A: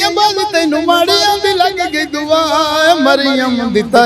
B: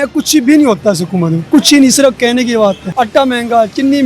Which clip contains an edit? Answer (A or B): B